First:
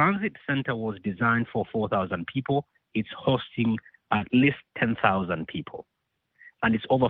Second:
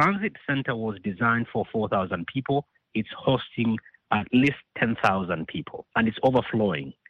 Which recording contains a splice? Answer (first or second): second